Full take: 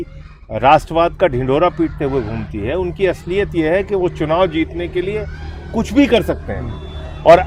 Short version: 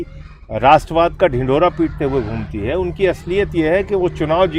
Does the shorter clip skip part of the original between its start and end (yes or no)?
no